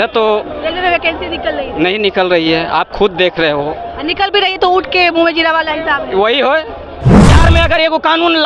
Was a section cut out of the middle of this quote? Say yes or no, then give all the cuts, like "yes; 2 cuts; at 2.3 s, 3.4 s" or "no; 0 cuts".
yes; 1 cut; at 7.3 s